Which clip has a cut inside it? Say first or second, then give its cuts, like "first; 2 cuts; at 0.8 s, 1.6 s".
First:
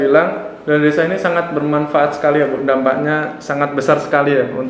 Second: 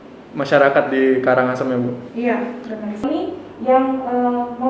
second; 1 cut; at 3.0 s